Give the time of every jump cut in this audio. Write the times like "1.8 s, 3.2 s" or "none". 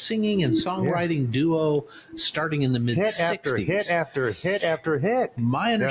none

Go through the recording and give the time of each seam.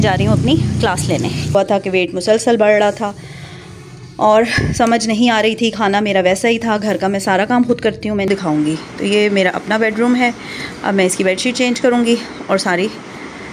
1.5 s, 8.3 s

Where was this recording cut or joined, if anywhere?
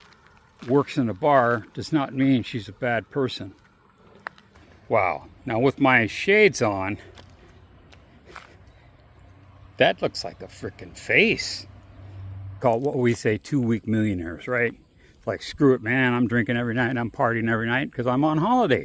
4.7 s, 12.4 s

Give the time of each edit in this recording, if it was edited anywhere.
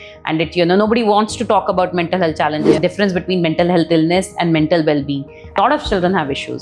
2.8 s, 5.6 s

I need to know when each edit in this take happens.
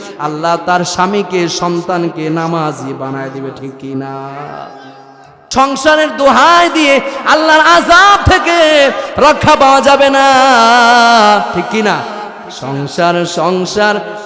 5.5 s

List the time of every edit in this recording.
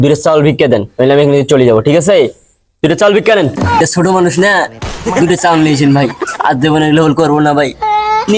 3.8 s

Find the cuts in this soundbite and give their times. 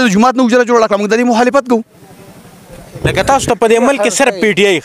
none

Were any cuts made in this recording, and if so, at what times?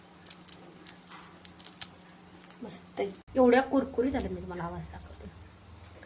3.2 s

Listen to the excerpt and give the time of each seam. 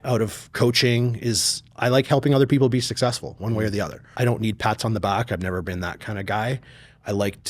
4.0 s

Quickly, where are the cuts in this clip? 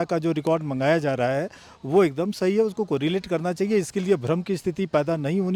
none

